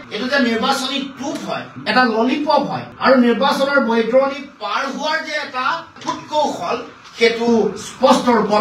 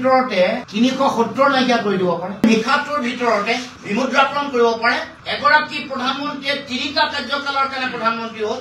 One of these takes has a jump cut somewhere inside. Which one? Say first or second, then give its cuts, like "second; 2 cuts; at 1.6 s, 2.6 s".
second; 1 cut; at 2.4 s